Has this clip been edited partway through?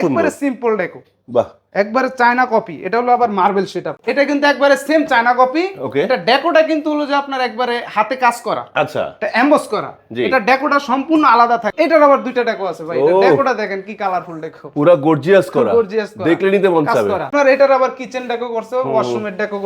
yes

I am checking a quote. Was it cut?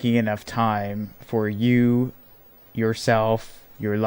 no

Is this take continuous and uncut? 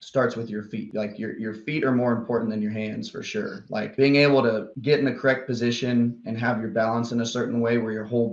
yes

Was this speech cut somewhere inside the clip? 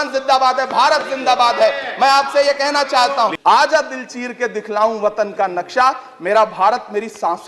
yes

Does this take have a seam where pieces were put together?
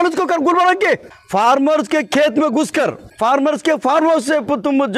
yes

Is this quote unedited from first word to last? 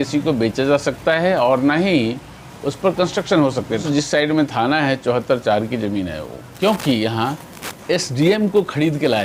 no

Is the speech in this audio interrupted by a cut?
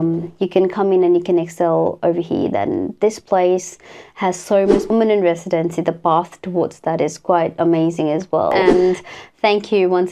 yes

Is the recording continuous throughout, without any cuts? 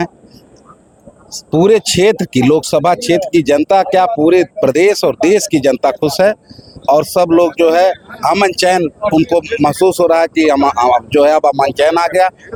yes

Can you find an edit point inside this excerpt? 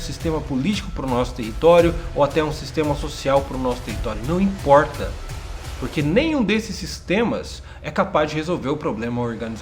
no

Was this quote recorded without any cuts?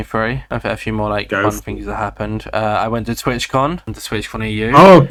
yes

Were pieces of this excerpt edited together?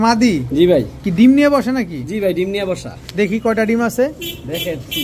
no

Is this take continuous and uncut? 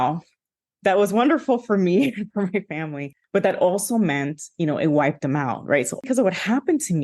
no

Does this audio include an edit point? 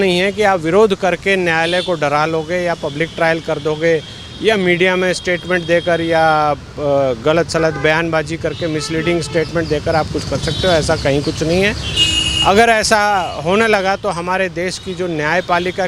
no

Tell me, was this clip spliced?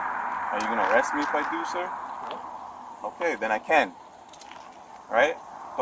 no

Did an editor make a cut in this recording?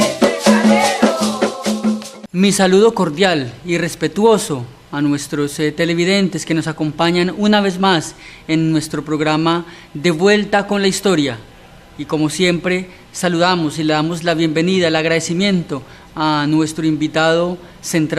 no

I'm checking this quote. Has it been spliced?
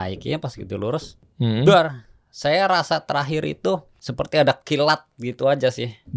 yes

